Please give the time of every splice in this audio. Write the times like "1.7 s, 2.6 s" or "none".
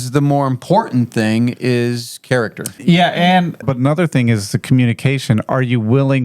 2.7 s, 3.6 s